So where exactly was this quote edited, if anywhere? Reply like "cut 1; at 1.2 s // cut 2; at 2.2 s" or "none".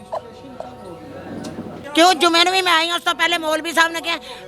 cut 1; at 1.8 s